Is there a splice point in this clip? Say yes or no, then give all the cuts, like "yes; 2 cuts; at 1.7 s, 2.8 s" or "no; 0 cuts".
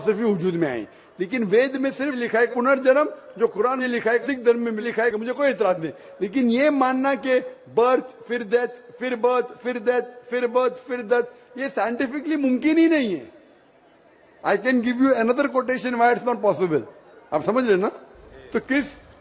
no; 0 cuts